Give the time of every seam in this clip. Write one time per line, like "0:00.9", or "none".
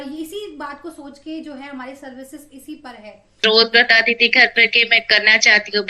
0:03.4

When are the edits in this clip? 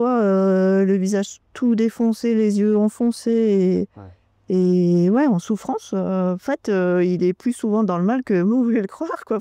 0:06.4

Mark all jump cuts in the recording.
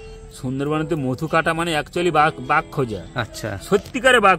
none

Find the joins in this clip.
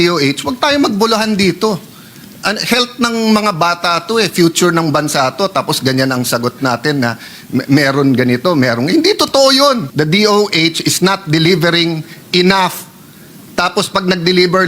0:09.9

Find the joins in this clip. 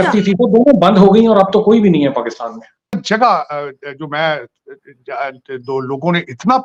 0:02.9

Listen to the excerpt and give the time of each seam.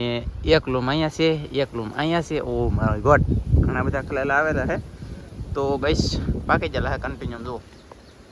none

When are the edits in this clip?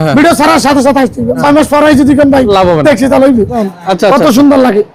0:01.4
0:03.6

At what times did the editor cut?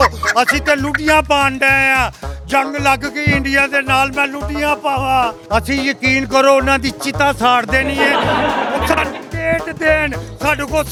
none

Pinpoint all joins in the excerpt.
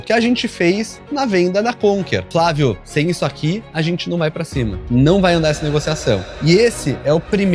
0:02.3
0:04.8
0:06.2

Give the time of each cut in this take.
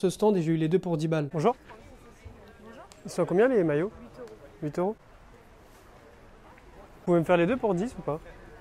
0:01.3

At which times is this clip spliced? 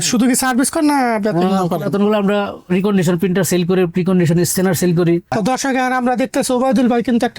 0:05.3

